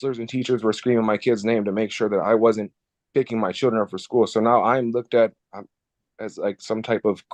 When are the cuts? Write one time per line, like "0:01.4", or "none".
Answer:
none